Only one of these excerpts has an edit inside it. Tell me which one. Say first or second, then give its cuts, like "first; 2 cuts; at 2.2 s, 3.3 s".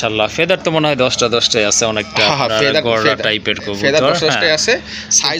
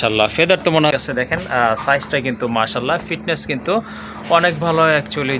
second; 1 cut; at 0.9 s